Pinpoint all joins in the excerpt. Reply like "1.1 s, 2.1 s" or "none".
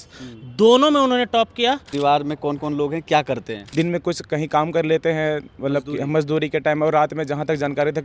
1.9 s, 3.6 s